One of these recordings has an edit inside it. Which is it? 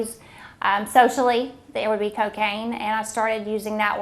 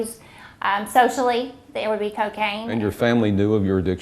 second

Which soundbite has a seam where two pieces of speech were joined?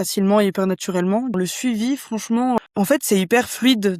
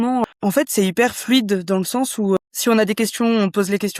first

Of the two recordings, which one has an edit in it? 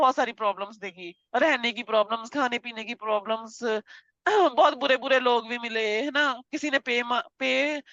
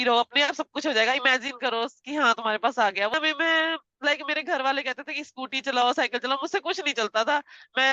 second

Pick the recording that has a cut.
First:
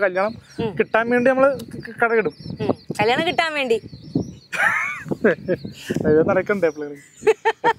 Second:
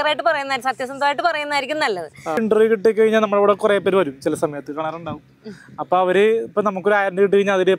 second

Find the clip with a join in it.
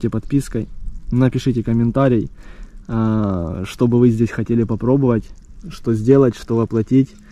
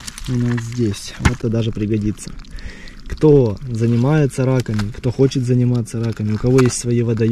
second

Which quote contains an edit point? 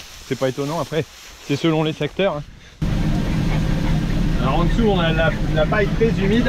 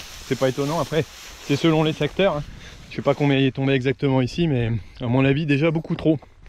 first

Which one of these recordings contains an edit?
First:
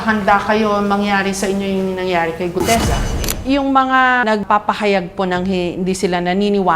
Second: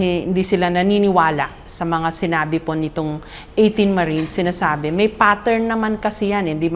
first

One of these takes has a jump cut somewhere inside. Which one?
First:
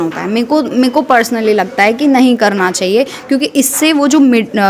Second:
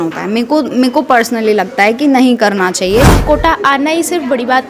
second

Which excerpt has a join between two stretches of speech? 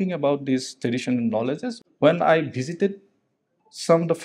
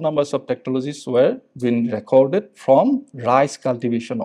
first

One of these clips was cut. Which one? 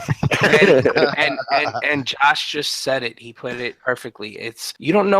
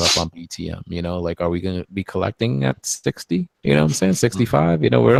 first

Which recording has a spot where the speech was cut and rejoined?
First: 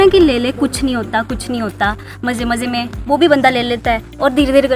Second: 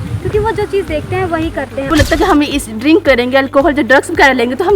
second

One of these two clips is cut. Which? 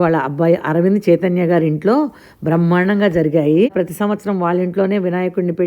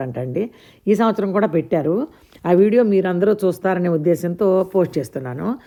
first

